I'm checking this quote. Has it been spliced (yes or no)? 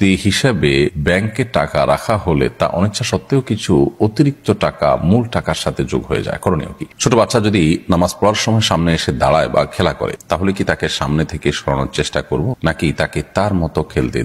yes